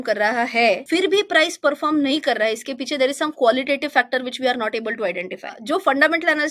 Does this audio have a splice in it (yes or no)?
yes